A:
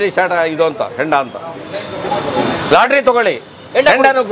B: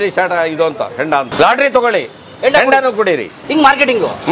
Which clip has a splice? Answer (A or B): B